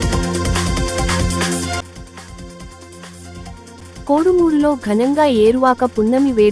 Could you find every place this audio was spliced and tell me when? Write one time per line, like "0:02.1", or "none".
0:01.8

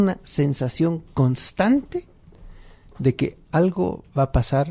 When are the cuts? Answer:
none

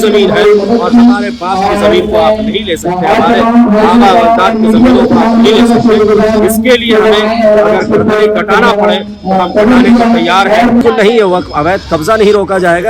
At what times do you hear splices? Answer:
0:10.8

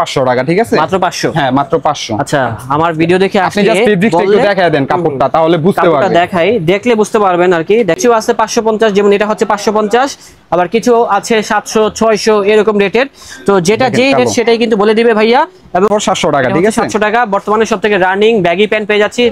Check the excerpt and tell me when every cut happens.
0:08.0
0:15.9

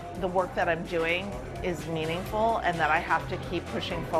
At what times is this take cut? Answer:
none

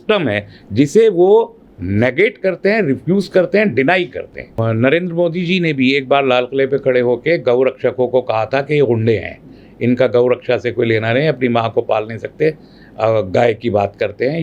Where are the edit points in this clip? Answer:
0:04.5

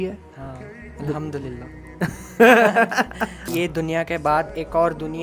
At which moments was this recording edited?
0:03.5

